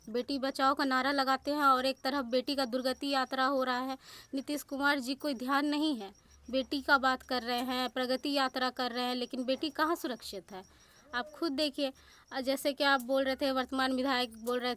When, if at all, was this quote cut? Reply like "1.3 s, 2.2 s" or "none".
none